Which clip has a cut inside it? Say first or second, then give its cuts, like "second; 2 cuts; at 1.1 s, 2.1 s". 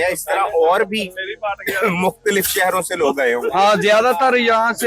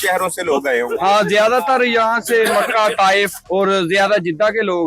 second; 1 cut; at 3.4 s